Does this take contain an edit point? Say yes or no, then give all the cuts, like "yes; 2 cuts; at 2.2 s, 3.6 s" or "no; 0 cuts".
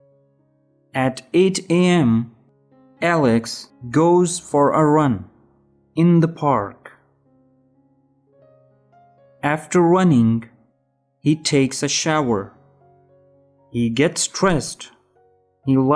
yes; 3 cuts; at 0.9 s, 7.6 s, 9.4 s